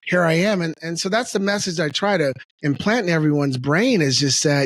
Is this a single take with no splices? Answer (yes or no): no